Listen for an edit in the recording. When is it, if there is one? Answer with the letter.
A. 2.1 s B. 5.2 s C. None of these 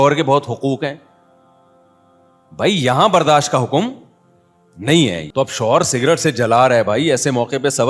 B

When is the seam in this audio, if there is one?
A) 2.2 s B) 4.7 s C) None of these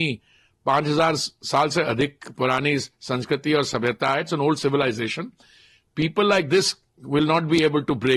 C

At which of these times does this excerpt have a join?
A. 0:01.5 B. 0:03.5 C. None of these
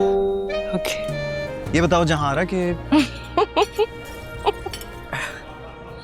A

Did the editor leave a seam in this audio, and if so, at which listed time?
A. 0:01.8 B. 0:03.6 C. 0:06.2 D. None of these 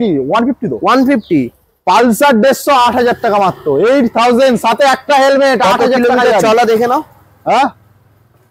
D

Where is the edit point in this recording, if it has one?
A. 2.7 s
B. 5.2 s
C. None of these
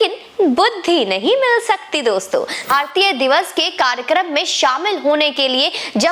A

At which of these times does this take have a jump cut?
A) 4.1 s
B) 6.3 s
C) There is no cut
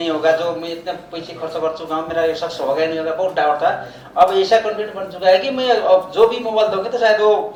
C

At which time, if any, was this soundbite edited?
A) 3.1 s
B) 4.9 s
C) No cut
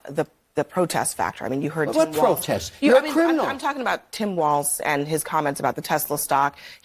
A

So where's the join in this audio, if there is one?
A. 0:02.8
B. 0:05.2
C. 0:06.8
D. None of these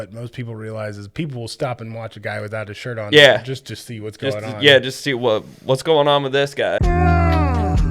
C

